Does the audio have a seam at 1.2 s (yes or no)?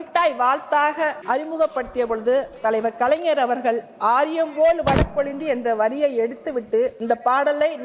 yes